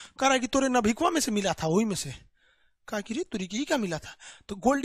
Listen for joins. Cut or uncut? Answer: uncut